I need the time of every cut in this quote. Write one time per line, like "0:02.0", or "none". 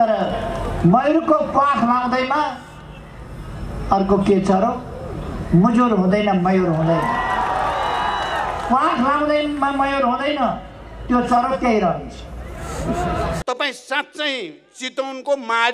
0:13.4